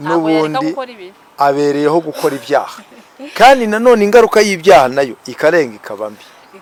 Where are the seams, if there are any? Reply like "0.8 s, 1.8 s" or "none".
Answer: none